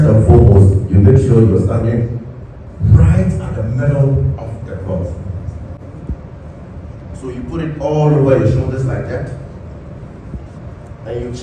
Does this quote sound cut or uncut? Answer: uncut